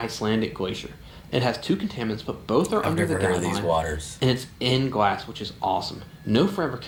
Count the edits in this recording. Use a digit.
0